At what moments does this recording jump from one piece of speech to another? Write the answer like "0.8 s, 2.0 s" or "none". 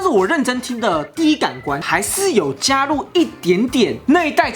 1.8 s